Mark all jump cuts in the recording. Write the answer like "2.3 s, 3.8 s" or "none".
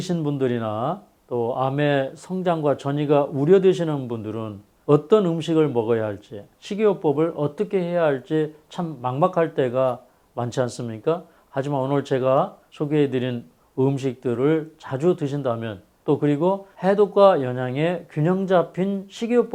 none